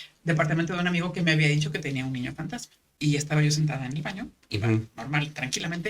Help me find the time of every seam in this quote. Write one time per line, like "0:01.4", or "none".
0:02.8